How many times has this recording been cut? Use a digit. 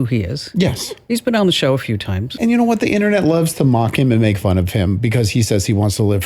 2